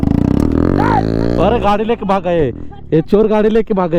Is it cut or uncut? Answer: uncut